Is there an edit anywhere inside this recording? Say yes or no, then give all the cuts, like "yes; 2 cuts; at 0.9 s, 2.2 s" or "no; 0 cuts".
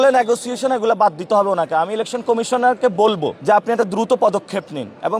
yes; 1 cut; at 3.3 s